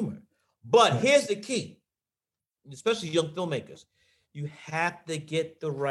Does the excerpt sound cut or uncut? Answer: cut